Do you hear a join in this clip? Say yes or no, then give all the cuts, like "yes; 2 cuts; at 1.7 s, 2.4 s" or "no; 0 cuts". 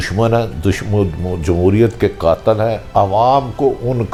no; 0 cuts